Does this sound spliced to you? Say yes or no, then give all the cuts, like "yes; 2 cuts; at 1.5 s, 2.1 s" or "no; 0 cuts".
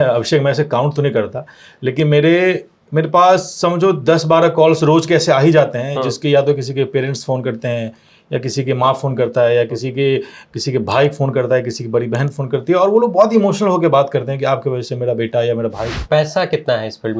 yes; 1 cut; at 15.9 s